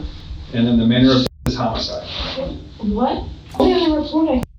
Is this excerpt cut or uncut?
cut